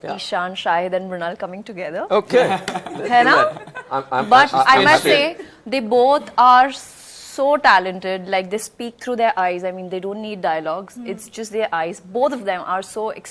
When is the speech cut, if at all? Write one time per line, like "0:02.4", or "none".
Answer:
none